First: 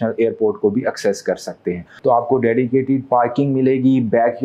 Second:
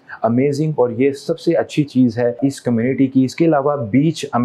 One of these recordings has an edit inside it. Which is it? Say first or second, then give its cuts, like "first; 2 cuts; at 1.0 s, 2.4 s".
first; 1 cut; at 1.9 s